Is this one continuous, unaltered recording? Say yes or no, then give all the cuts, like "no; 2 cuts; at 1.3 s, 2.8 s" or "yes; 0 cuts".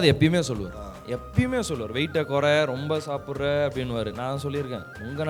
yes; 0 cuts